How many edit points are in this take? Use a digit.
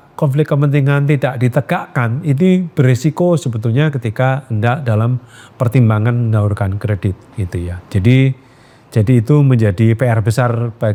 0